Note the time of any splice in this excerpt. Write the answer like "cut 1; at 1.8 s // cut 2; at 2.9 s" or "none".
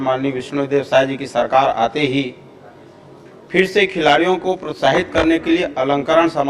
none